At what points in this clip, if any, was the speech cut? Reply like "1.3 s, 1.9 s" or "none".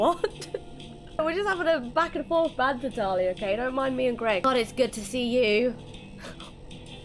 1.2 s, 4.4 s